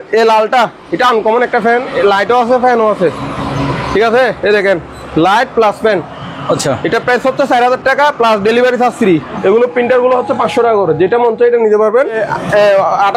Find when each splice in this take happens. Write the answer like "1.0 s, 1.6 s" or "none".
9.4 s, 12.2 s